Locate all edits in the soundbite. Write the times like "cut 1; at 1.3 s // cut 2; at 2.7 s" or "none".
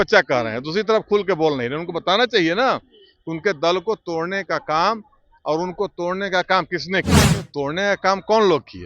cut 1; at 7.4 s